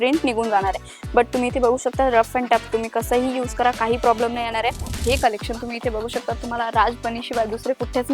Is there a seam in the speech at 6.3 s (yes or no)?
no